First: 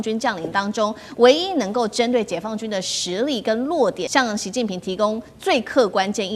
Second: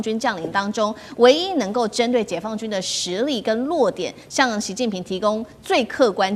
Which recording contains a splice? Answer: first; 1 cut; at 4.0 s

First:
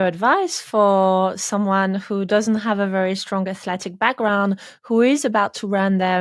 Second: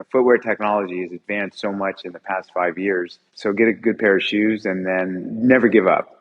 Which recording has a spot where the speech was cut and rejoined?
second; 2 cuts; at 3.2 s, 5.2 s

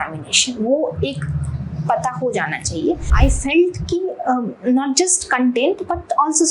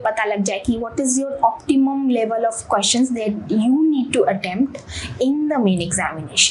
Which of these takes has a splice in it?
first; 1 cut; at 3.1 s

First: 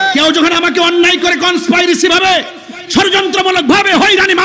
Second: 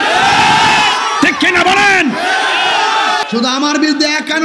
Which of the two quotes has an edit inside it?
second; 1 cut; at 3.2 s

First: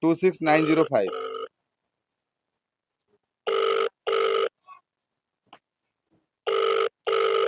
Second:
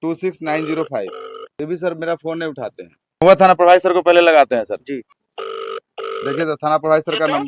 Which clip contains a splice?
second; 3 cuts; at 1.5 s, 3.2 s, 5.2 s

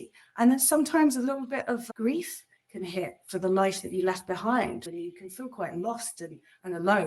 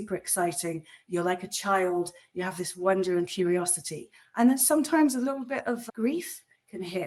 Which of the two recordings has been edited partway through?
first; 1 cut; at 4.9 s

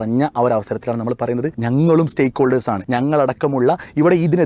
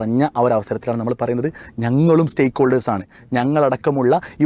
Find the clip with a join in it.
first; 2 cuts; at 1.6 s, 2.8 s

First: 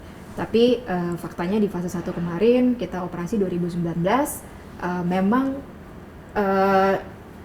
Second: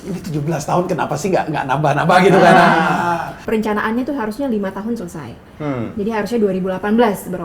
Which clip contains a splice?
second; 1 cut; at 3.3 s

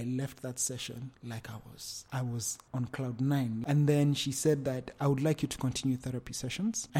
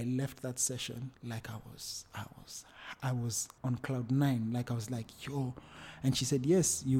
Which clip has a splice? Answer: first; 2 cuts; at 1.9 s, 3.6 s

